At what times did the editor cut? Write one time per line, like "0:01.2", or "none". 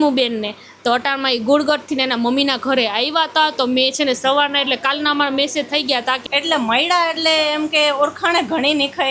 0:06.2